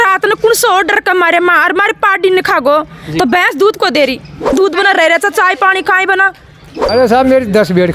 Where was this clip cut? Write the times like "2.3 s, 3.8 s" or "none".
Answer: 4.4 s, 6.7 s